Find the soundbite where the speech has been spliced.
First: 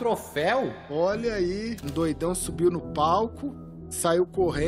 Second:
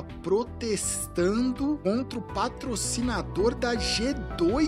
first; 1 cut; at 1.8 s

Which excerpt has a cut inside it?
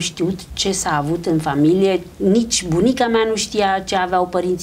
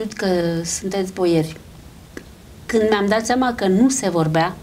first; 1 cut; at 2.1 s

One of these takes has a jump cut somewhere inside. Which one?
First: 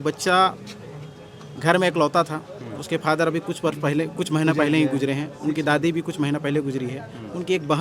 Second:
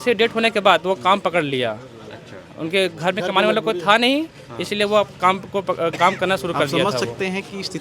second; 1 cut; at 6.8 s

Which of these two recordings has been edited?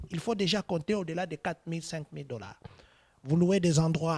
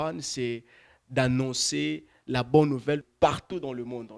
second; 1 cut; at 3.0 s

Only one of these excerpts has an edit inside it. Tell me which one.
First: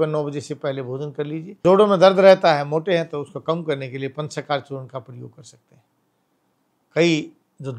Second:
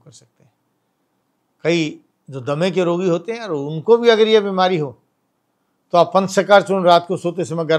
first; 1 cut; at 1.6 s

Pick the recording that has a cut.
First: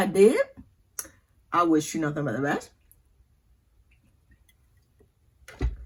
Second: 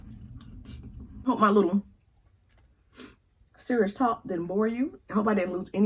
second; 1 cut; at 1.3 s

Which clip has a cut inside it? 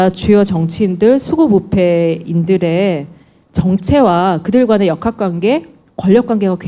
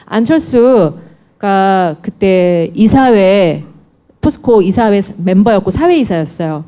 second; 1 cut; at 3.4 s

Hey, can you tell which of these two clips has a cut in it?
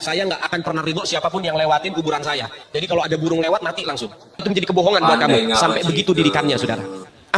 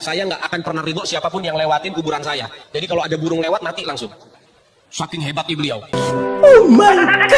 first; 1 cut; at 4.4 s

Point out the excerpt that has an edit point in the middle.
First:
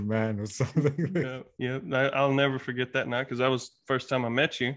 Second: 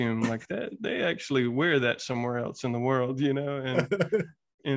first; 1 cut; at 1.4 s

